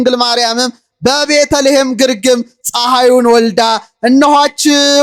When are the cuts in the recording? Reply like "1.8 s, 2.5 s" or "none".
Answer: none